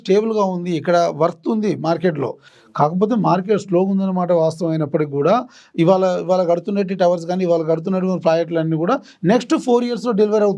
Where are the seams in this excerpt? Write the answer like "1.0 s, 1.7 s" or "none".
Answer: none

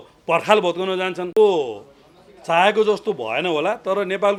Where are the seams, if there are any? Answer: none

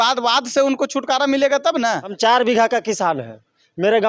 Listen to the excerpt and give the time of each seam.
2.1 s

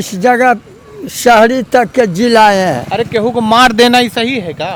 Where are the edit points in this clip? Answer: none

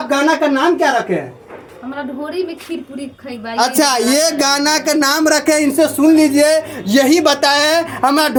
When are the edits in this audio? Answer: none

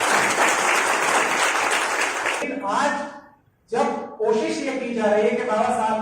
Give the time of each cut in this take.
2.4 s

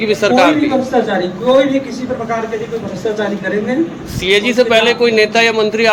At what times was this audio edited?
none

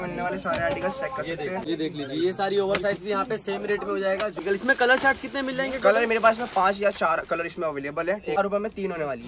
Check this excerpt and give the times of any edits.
1.6 s, 4.4 s, 8.4 s

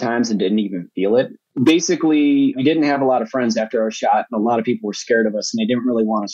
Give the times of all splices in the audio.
1.4 s, 2.5 s

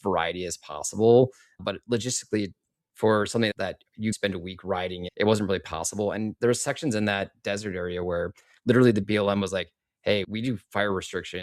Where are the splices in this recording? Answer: 9.0 s

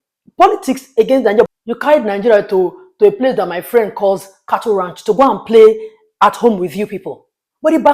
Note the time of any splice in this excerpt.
1.5 s

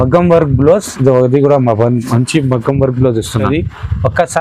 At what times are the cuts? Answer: 3.5 s

